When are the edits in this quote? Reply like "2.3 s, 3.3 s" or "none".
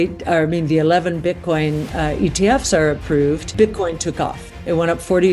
3.5 s